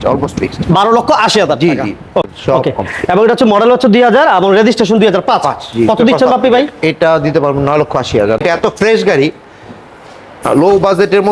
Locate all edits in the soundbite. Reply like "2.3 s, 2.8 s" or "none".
2.3 s, 8.4 s